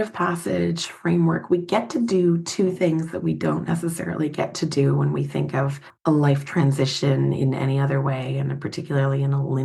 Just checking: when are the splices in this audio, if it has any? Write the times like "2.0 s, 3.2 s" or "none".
5.8 s